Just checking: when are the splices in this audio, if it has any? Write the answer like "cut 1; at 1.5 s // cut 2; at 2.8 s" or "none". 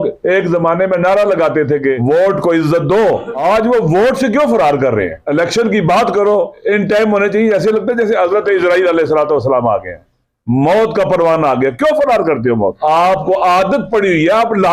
cut 1; at 2.0 s // cut 2; at 3.3 s // cut 3; at 5.2 s // cut 4; at 6.6 s // cut 5; at 12.8 s